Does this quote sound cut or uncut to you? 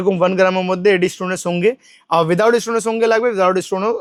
uncut